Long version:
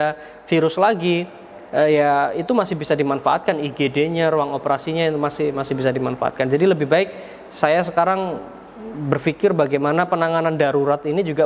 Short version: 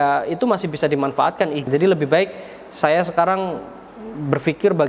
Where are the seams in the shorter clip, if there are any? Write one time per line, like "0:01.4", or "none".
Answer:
0:01.7

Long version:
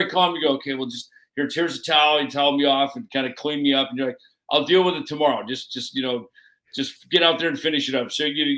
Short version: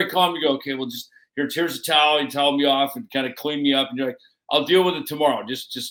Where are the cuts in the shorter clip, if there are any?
none

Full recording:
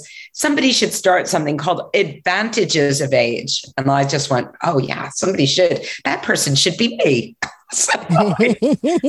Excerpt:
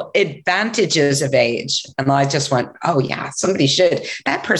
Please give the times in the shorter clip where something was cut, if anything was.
none

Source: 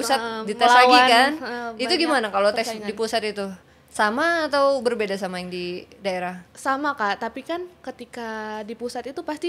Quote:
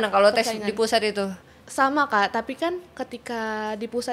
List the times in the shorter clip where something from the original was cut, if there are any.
0:01.6

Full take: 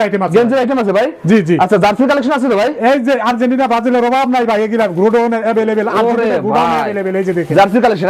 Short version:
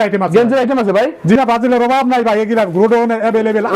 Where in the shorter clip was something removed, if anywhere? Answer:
0:01.4

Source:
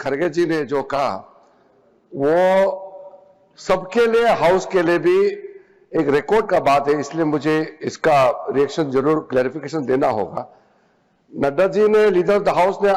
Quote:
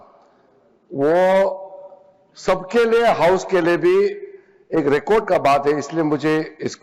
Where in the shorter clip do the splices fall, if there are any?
none

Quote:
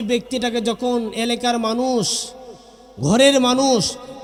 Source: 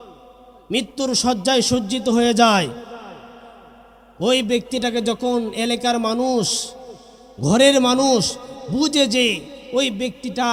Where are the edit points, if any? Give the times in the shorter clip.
none

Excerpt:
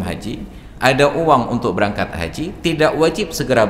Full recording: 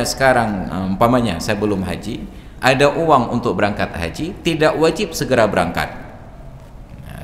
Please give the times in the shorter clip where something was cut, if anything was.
none

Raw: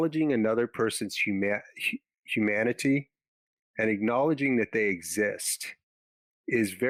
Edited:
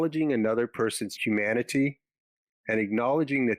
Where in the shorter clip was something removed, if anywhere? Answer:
0:01.1

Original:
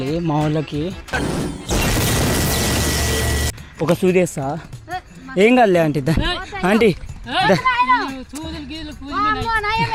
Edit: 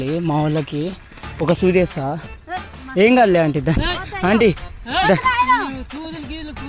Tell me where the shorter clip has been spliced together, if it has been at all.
0:01.1

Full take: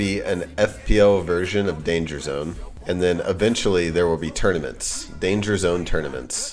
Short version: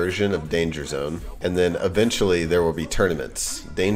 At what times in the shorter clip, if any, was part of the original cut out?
0:01.3

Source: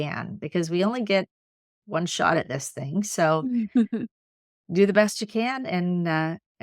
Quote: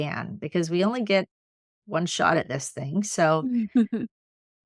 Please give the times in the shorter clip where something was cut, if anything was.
none

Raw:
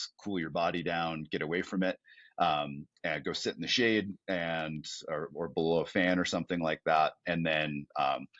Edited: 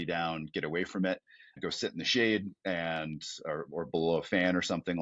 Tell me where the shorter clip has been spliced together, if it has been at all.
0:01.5

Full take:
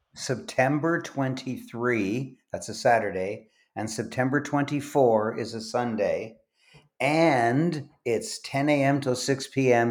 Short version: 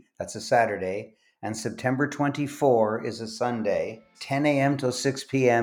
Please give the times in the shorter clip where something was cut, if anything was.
0:04.1

